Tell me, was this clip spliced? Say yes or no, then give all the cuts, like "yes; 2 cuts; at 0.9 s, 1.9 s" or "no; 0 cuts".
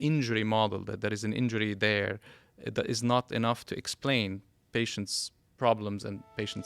no; 0 cuts